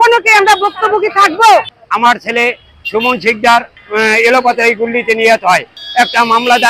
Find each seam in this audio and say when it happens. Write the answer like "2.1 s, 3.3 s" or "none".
3.8 s, 5.8 s